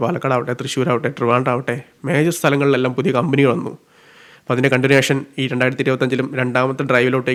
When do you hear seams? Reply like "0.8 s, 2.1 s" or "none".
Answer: none